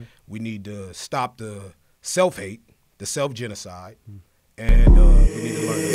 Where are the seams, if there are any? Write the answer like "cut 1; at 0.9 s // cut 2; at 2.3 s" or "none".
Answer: cut 1; at 4.8 s

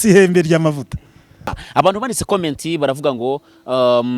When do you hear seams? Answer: cut 1; at 1.5 s

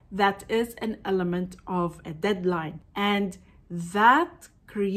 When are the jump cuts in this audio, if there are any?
cut 1; at 2.8 s

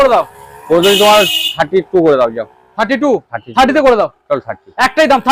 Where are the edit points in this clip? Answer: none

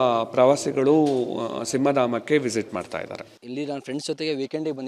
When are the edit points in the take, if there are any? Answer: cut 1; at 3.2 s

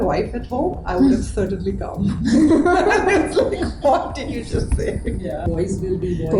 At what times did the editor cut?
cut 1; at 5.4 s

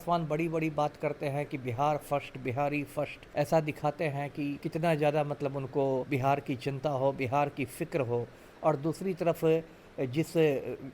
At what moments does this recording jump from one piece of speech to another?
cut 1; at 3.2 s // cut 2; at 4.6 s // cut 3; at 6.1 s

